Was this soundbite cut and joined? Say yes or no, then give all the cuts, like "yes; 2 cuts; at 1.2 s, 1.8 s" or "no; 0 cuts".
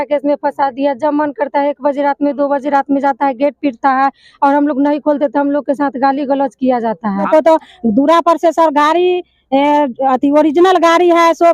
yes; 1 cut; at 7.3 s